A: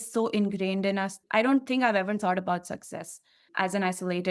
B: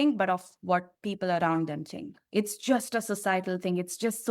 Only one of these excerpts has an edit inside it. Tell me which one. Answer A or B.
A